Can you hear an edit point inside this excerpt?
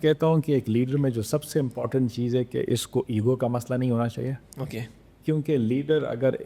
no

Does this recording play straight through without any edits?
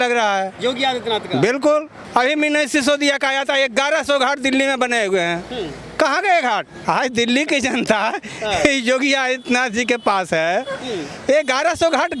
no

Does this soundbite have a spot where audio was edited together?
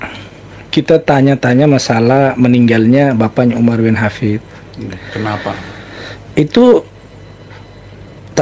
no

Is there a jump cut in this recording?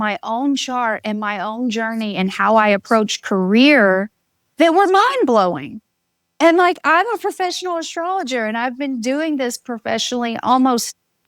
no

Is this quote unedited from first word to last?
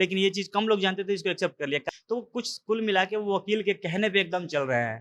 no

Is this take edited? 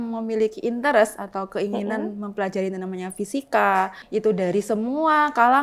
yes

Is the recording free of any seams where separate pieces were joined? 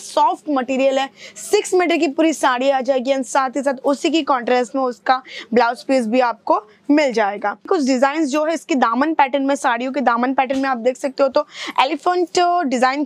no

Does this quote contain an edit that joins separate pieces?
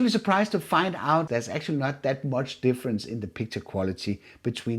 yes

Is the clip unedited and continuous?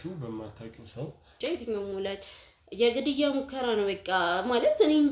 no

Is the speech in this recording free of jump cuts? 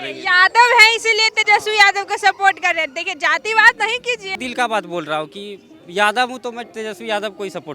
no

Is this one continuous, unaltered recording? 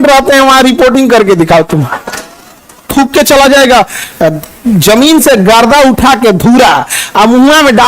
no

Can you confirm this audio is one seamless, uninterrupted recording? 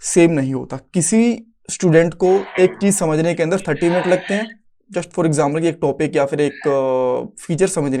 yes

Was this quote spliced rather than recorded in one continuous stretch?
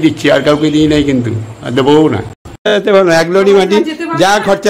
yes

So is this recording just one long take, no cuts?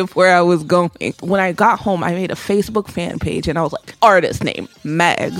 no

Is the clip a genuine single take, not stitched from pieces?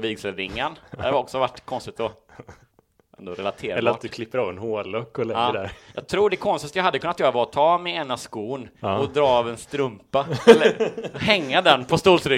yes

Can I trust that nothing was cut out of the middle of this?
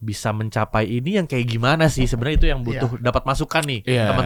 yes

